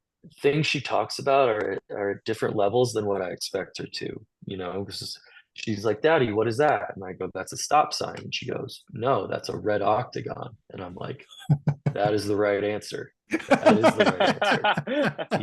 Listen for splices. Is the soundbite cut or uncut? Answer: uncut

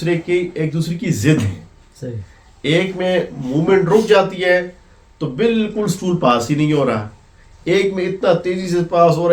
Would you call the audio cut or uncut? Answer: uncut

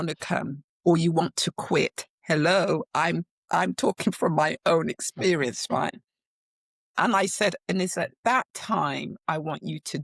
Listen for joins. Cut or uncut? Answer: uncut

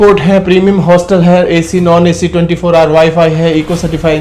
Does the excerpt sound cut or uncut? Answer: uncut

